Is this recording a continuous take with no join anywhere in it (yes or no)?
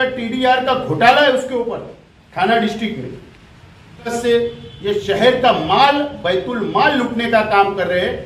no